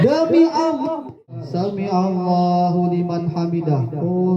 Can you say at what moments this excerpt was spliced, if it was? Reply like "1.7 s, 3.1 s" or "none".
1.4 s